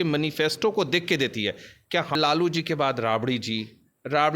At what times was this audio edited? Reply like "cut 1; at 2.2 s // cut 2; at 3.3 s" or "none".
cut 1; at 2.2 s

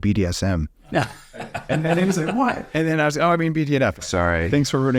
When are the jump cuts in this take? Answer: cut 1; at 3.9 s

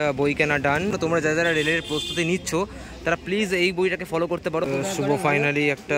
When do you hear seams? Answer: cut 1; at 1.0 s // cut 2; at 4.7 s

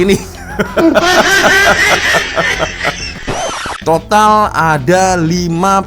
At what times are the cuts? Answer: cut 1; at 3.5 s

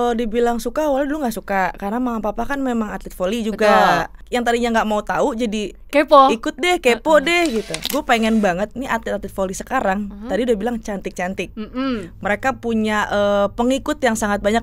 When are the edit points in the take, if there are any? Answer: cut 1; at 4.2 s // cut 2; at 7.8 s

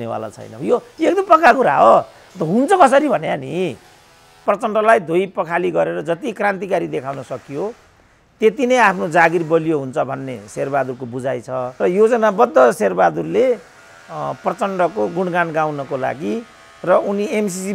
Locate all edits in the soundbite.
cut 1; at 4.4 s // cut 2; at 11.7 s

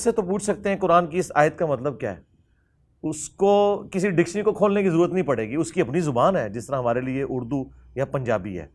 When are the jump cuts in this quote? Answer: none

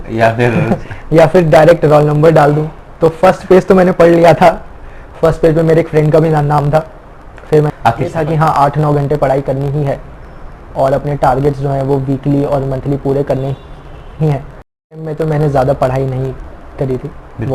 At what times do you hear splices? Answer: cut 1; at 7.9 s // cut 2; at 15.0 s

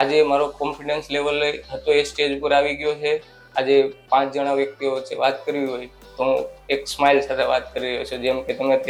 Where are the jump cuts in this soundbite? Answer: none

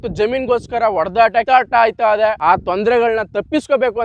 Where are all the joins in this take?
cut 1; at 1.5 s // cut 2; at 2.4 s

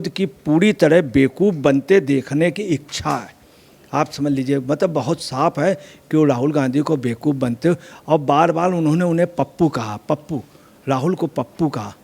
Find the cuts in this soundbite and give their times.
none

